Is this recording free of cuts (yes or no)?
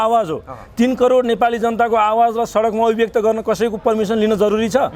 yes